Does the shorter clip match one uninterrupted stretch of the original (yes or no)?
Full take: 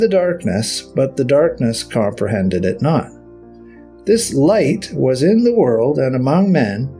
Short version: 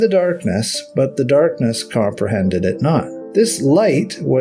no